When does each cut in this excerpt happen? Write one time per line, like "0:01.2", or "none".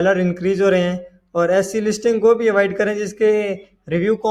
none